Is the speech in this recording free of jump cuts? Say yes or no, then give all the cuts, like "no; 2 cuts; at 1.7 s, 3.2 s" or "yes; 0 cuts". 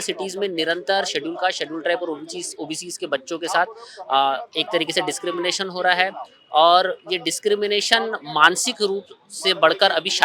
yes; 0 cuts